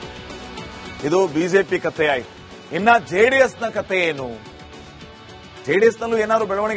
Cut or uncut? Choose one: cut